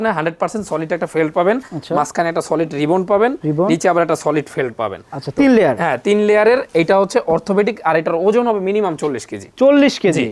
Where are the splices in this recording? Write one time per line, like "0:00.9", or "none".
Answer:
none